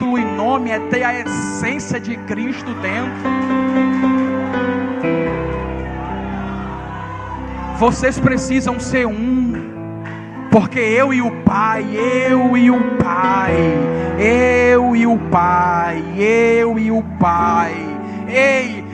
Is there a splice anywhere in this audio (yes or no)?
no